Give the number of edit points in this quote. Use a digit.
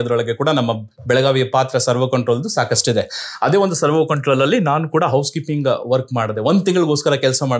0